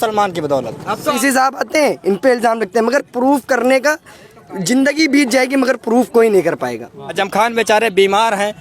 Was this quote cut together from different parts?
yes; 2 cuts; at 1.2 s, 7.2 s

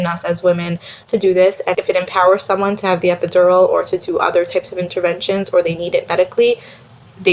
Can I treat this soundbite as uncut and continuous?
no; 1 cut; at 1.7 s

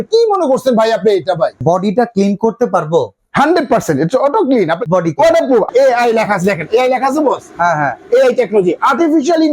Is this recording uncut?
no; 3 cuts; at 1.6 s, 4.8 s, 5.7 s

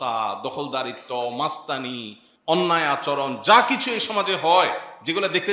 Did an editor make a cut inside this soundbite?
no; 0 cuts

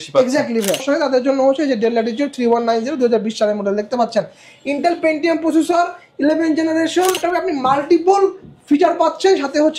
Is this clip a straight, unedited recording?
no; 2 cuts; at 0.8 s, 7.2 s

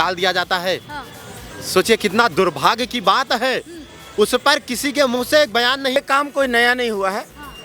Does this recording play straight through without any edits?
no; 1 cut; at 6.0 s

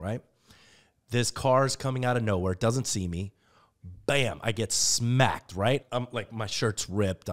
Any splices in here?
yes; 1 cut; at 5.8 s

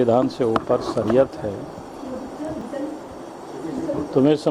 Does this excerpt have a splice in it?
no; 0 cuts

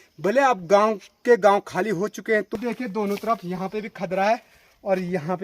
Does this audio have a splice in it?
yes; 1 cut; at 2.5 s

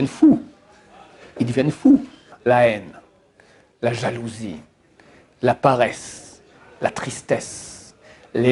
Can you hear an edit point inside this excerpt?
yes; 1 cut; at 2.3 s

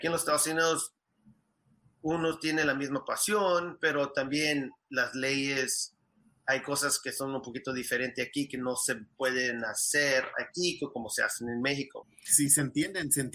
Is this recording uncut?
no; 1 cut; at 12.0 s

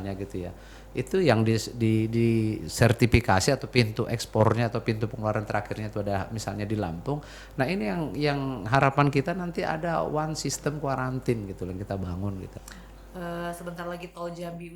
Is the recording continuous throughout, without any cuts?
no; 1 cut; at 12.6 s

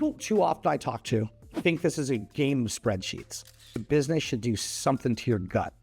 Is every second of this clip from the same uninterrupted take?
no; 2 cuts; at 1.4 s, 3.8 s

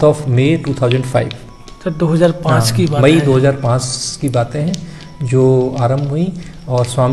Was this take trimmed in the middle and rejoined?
no; 0 cuts

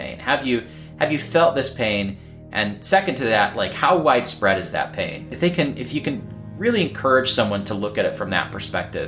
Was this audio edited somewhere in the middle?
no; 0 cuts

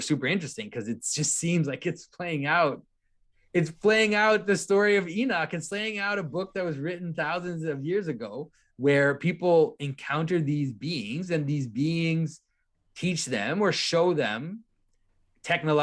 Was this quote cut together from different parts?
no; 0 cuts

